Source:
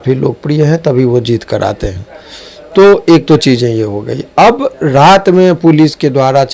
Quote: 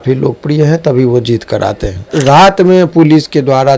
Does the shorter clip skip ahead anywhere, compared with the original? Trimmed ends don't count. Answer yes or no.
yes